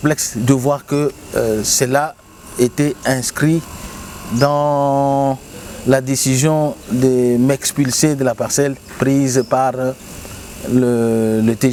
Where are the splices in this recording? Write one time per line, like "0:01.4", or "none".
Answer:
none